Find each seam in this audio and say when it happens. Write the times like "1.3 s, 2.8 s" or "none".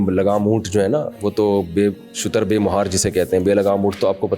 none

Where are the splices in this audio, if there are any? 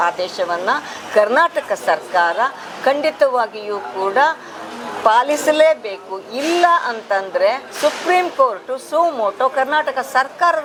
none

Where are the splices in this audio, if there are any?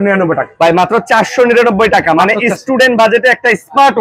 none

